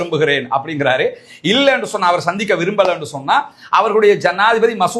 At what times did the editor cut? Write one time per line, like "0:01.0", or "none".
none

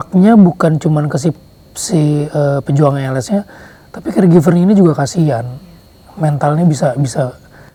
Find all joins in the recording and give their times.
none

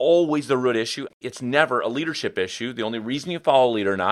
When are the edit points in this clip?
0:01.1

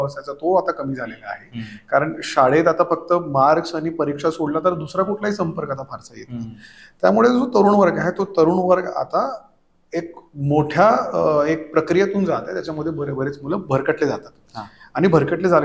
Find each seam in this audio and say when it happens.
none

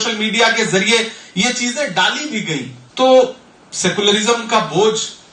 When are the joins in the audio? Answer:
0:02.8

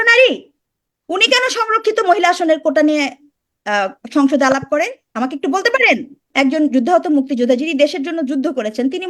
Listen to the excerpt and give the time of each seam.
0:06.3

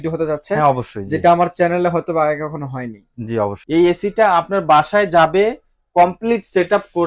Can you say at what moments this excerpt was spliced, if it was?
0:03.6

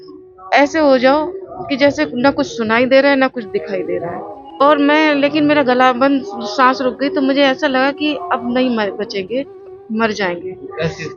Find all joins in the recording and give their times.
0:04.6

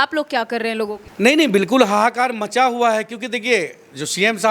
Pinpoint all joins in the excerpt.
0:01.0

